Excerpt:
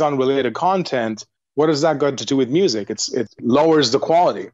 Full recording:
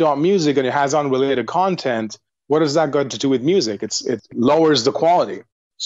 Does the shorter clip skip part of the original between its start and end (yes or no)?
no